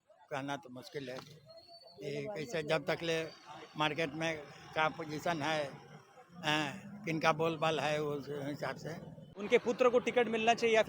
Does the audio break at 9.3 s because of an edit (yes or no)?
yes